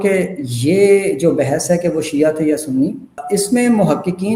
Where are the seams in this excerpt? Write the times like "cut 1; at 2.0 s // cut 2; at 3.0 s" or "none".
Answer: cut 1; at 3.2 s

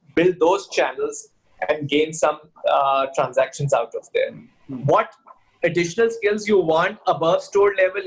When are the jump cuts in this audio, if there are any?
cut 1; at 4.5 s

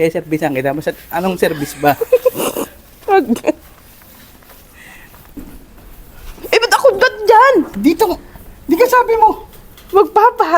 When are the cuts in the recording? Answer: cut 1; at 5.4 s

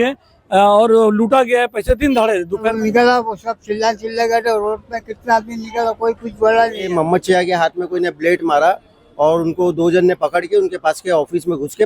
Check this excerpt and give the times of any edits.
cut 1; at 2.8 s // cut 2; at 6.9 s

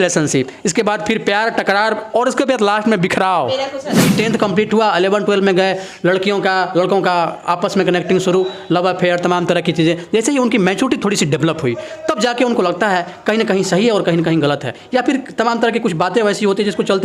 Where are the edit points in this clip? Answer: cut 1; at 4.1 s

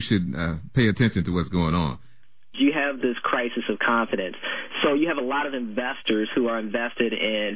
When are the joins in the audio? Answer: cut 1; at 2.3 s

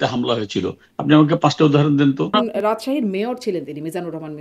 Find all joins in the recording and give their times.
cut 1; at 2.3 s

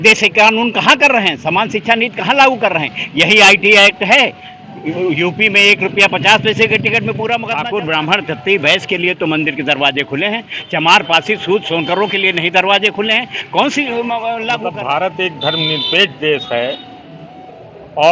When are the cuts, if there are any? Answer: cut 1; at 7.5 s // cut 2; at 14.6 s

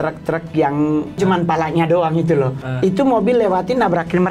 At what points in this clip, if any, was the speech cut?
cut 1; at 1.2 s // cut 2; at 2.6 s

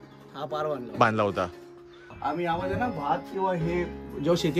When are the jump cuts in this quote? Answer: cut 1; at 2.2 s

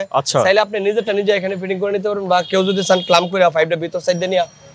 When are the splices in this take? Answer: none

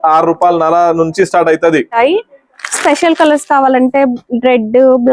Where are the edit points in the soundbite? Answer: cut 1; at 1.9 s

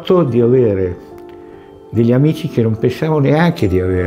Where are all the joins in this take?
none

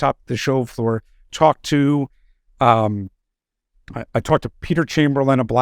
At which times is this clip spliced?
none

